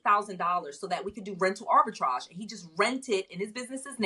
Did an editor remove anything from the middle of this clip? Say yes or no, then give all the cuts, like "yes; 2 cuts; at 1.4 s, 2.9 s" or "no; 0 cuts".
no; 0 cuts